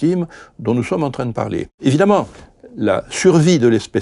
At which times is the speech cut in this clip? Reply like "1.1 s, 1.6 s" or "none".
1.7 s